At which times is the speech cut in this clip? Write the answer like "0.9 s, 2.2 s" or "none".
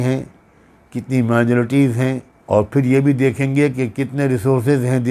2.3 s